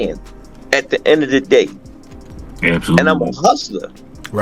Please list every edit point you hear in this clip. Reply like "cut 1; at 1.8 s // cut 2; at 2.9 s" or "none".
none